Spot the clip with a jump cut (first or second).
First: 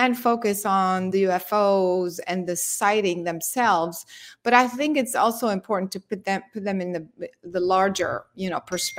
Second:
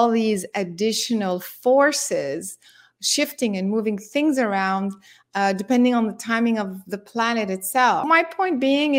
second